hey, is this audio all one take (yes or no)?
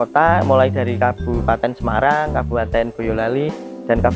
yes